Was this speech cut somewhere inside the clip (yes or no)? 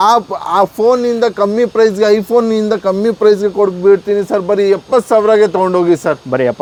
no